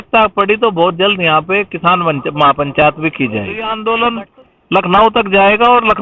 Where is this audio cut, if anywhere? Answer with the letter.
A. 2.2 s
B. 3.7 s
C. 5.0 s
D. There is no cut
B